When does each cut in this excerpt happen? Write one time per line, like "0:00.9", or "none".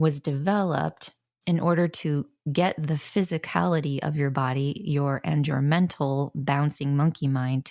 none